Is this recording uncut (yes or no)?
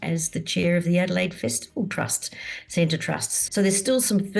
no